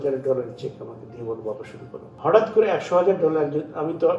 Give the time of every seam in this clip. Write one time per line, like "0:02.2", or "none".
0:02.1